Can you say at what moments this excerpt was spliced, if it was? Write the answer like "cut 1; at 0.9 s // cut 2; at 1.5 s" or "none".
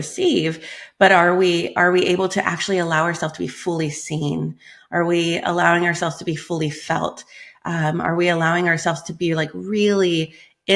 none